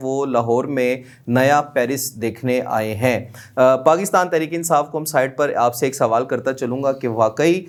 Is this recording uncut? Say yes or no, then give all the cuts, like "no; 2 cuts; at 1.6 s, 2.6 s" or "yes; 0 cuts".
yes; 0 cuts